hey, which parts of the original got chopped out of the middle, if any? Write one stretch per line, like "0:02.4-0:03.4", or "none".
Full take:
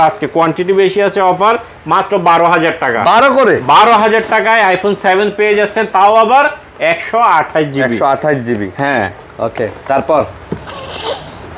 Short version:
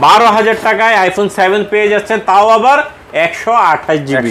none